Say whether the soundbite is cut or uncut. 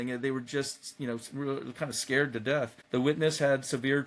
cut